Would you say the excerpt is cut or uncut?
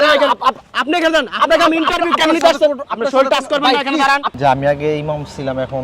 cut